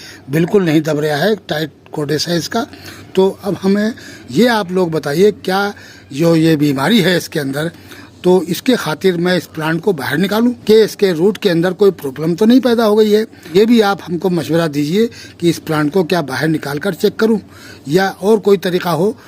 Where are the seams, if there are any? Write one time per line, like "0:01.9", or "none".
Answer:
0:10.6
0:13.5

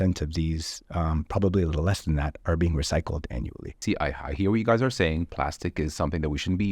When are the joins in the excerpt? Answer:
0:03.8

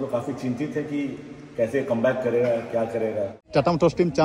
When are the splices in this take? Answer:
0:03.3

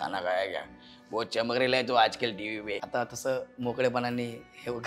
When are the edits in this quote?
0:02.8

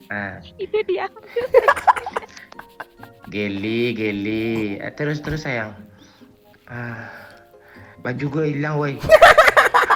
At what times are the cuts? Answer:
none

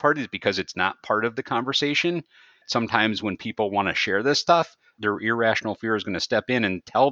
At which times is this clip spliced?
0:02.7
0:04.9

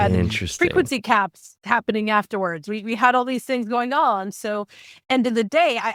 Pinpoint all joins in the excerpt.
none

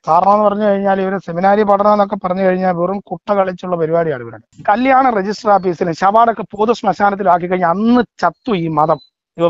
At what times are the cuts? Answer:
0:04.5

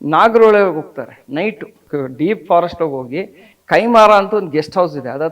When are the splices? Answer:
0:01.8

